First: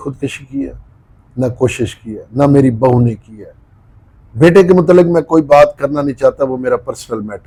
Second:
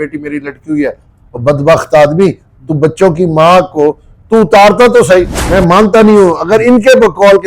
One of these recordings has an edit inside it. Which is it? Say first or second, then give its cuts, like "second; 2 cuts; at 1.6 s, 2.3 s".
second; 1 cut; at 5.4 s